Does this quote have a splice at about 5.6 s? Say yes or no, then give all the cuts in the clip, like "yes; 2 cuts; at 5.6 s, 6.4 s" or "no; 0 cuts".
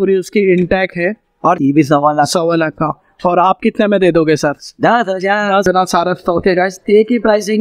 yes; 2 cuts; at 1.6 s, 5.6 s